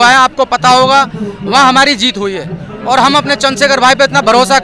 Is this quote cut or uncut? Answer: uncut